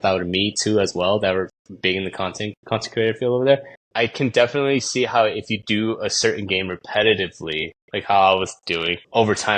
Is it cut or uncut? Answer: cut